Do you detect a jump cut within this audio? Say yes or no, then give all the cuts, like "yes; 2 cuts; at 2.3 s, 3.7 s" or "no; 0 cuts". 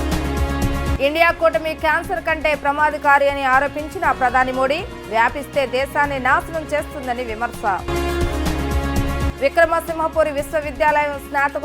yes; 1 cut; at 0.9 s